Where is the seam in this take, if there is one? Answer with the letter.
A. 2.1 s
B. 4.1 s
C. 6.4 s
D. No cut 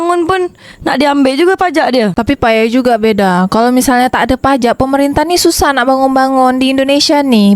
D